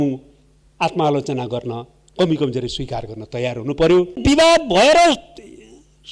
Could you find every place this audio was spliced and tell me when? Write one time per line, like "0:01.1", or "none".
0:04.2